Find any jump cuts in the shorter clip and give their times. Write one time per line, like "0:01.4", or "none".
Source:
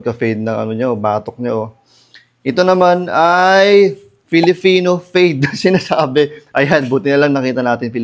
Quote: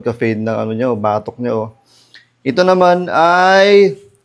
none